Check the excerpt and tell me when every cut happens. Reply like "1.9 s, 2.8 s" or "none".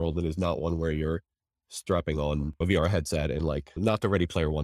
none